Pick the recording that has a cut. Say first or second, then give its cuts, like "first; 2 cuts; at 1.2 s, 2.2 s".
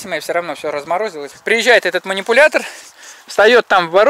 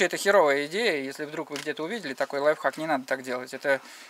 first; 1 cut; at 1.3 s